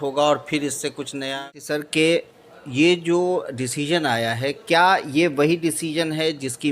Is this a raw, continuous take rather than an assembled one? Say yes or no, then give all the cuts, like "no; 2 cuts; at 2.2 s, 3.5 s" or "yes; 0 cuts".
no; 1 cut; at 1.4 s